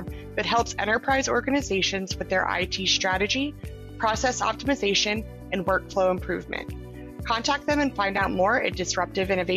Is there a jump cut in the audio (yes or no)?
no